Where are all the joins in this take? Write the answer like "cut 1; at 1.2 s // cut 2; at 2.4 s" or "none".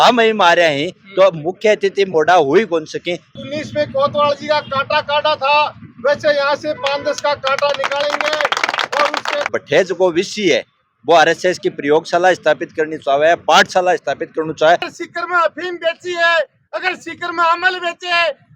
cut 1; at 3.4 s // cut 2; at 9.5 s // cut 3; at 14.9 s